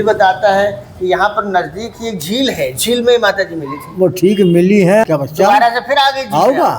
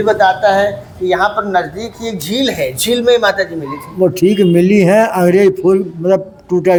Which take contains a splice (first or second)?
first